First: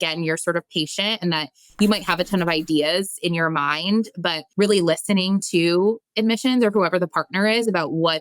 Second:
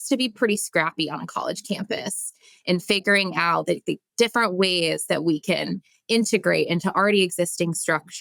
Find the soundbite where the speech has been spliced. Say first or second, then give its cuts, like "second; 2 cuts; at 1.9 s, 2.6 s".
first; 1 cut; at 4.4 s